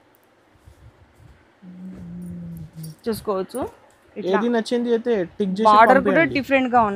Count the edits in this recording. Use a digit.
0